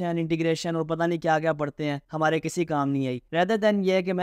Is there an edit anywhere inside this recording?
yes; 2 cuts; at 2.0 s, 3.2 s

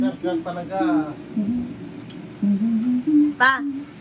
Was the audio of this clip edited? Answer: no; 0 cuts

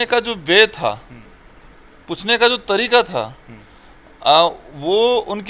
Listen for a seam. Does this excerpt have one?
no; 0 cuts

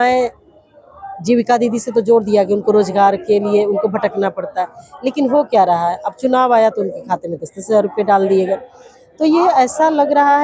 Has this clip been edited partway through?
no; 0 cuts

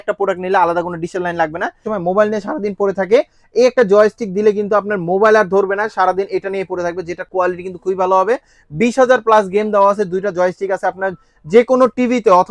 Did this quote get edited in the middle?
yes; 1 cut; at 1.9 s

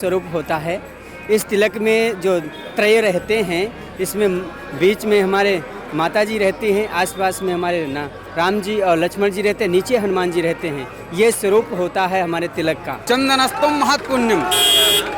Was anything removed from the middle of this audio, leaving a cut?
yes; 1 cut; at 13.0 s

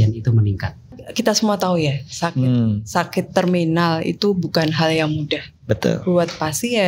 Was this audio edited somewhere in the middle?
yes; 1 cut; at 1.0 s

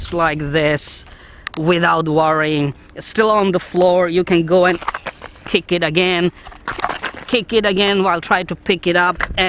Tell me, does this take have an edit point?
no; 0 cuts

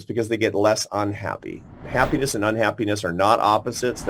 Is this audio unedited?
no; 1 cut; at 1.7 s

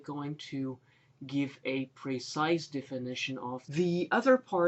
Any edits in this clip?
no; 0 cuts

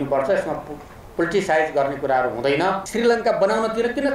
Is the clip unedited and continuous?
no; 1 cut; at 2.8 s

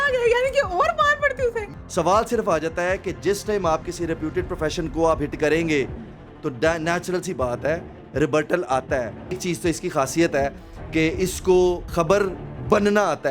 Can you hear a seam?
yes; 3 cuts; at 1.7 s, 9.4 s, 11.9 s

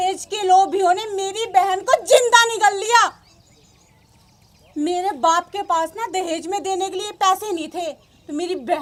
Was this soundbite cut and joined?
no; 0 cuts

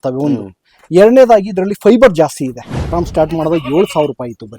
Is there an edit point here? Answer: yes; 1 cut; at 2.9 s

